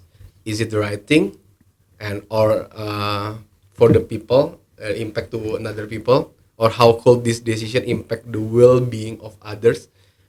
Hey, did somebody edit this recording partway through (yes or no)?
no